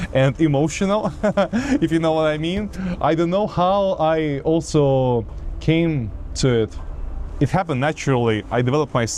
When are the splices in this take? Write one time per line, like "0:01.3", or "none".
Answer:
none